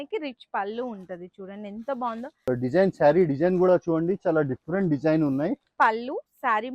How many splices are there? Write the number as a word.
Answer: two